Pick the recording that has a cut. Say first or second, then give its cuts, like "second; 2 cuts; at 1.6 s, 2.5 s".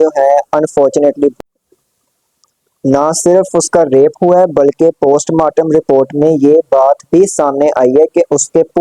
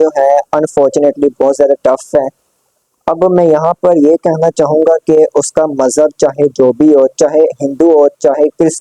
first; 1 cut; at 1.4 s